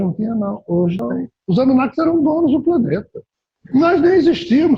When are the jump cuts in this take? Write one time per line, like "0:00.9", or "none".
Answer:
0:01.1